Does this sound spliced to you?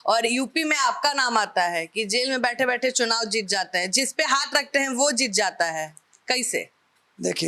no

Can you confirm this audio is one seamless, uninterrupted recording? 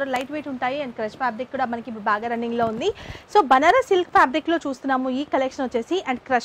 yes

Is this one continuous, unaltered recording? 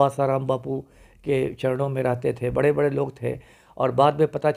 yes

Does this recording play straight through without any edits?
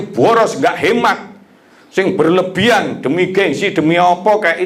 yes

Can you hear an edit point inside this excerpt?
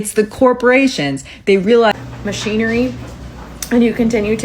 yes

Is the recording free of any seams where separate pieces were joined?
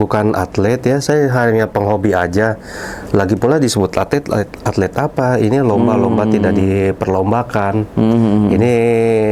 yes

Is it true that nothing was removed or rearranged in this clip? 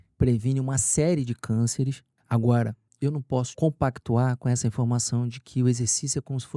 no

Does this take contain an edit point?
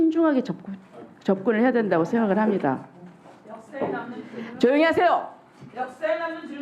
no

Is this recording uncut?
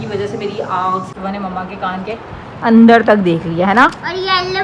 no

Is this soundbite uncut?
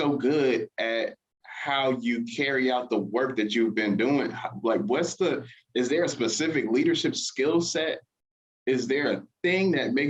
yes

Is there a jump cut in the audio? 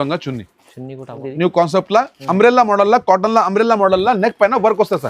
yes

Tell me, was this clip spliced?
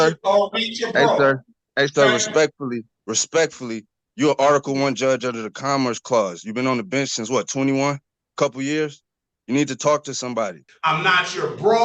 yes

